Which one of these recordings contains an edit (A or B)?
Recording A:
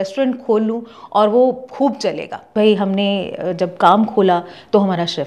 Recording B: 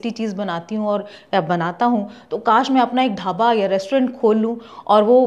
A